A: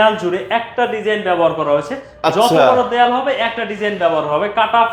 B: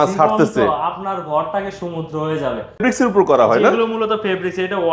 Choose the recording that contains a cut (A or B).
B